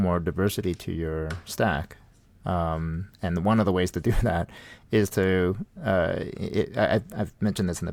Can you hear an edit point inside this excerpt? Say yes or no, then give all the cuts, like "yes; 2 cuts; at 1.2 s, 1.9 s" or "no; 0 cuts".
no; 0 cuts